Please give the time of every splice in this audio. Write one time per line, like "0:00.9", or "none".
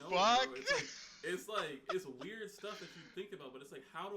none

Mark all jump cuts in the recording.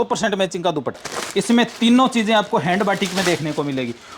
0:01.1

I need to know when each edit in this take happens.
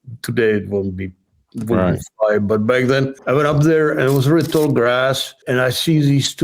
0:03.2
0:05.3

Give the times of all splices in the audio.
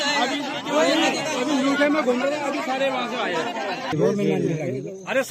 0:03.9

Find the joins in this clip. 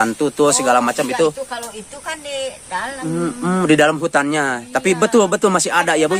none

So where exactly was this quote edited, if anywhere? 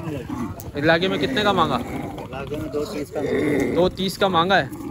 none

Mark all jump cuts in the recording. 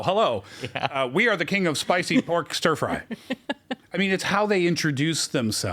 none

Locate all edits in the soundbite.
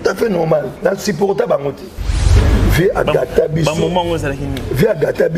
0:02.4

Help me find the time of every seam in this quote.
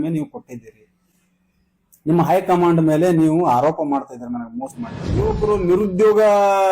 0:05.1

